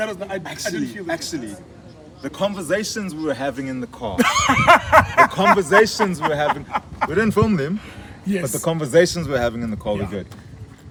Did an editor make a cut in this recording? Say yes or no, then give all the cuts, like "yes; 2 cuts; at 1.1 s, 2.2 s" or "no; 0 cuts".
no; 0 cuts